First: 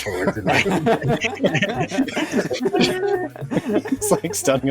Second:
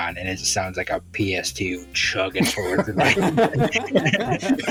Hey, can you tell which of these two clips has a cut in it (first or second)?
first